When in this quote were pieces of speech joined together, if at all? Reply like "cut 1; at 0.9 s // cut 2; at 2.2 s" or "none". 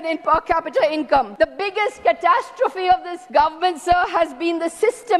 cut 1; at 1.3 s // cut 2; at 3.2 s